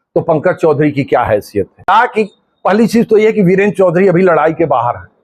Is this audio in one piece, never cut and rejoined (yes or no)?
no